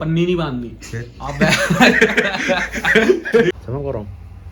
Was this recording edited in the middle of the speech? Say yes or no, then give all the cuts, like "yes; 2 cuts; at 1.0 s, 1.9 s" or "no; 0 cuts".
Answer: yes; 1 cut; at 3.5 s